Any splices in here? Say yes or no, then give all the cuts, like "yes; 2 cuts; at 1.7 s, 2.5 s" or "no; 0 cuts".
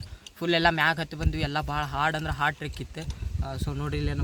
no; 0 cuts